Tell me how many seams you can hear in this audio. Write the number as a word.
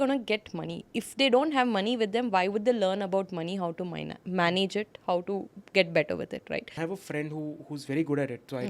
one